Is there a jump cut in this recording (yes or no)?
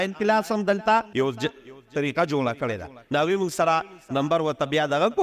yes